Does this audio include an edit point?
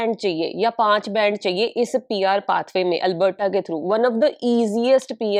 no; 0 cuts

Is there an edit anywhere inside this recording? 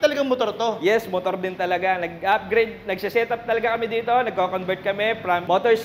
no; 0 cuts

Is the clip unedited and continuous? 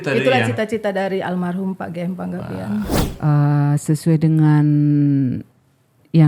no; 1 cut; at 3.0 s

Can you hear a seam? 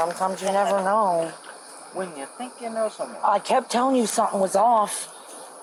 no; 0 cuts

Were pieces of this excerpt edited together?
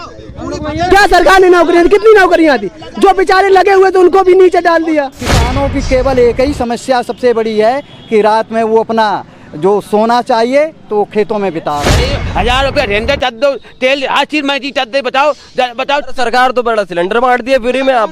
yes; 2 cuts; at 5.4 s, 12.1 s

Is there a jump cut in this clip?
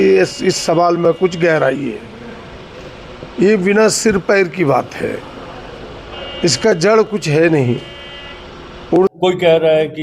yes; 1 cut; at 9.1 s

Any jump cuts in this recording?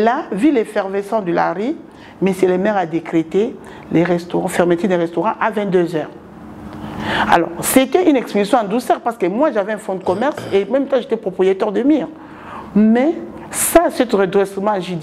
no; 0 cuts

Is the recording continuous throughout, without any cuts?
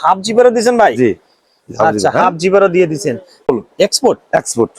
no; 1 cut; at 3.5 s

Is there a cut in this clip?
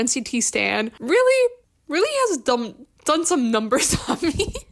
yes; 2 cuts; at 1.0 s, 1.7 s

